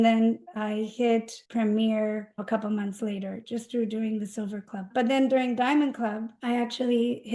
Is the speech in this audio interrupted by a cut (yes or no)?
yes